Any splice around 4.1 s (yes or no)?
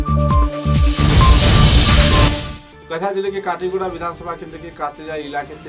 no